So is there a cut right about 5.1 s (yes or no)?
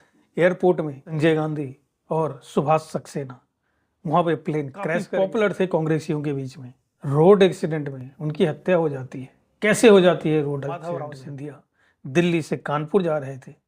yes